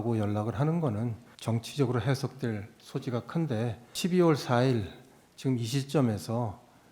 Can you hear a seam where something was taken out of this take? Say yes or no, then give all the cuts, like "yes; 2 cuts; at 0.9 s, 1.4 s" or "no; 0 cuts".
yes; 2 cuts; at 1.3 s, 3.9 s